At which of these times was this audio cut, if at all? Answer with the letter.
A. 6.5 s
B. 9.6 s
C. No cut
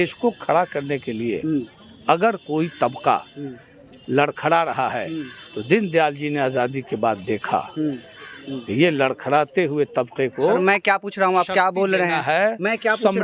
C